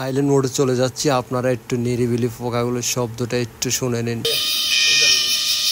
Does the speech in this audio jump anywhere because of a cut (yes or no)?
no